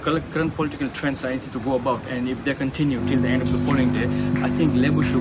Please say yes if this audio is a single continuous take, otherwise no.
yes